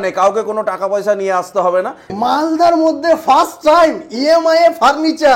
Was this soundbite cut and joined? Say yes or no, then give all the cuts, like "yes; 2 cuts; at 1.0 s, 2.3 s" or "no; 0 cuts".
yes; 1 cut; at 2.1 s